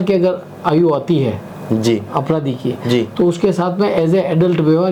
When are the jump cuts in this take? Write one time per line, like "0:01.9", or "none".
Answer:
none